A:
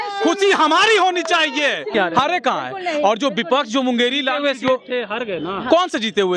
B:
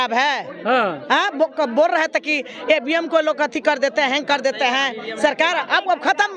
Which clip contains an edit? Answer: A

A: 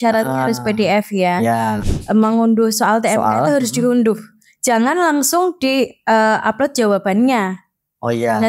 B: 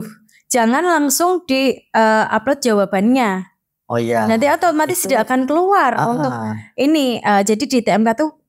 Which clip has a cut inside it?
A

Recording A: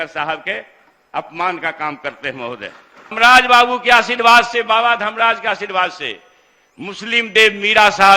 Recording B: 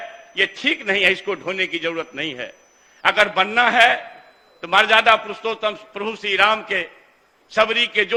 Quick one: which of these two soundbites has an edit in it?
A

